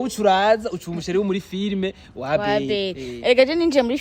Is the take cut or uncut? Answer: uncut